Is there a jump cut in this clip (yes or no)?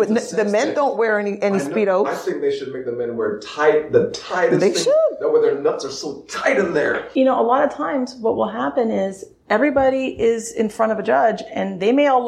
yes